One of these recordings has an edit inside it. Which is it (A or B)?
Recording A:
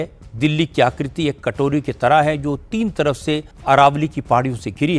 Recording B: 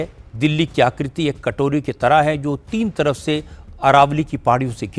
A